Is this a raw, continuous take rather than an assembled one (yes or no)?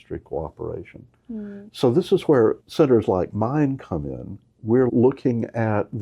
no